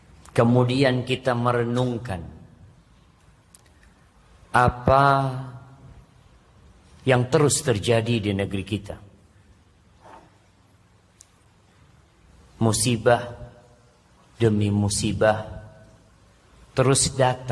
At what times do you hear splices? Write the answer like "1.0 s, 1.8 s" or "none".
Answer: none